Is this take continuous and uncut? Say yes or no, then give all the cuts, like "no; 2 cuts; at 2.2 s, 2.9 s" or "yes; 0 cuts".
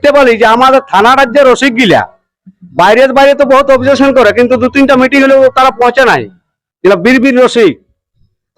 yes; 0 cuts